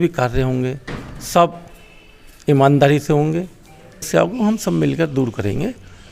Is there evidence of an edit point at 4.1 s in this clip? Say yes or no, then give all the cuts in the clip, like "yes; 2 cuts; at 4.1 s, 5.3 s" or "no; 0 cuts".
yes; 1 cut; at 4.1 s